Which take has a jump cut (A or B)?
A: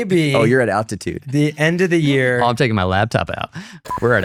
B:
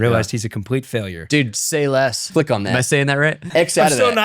B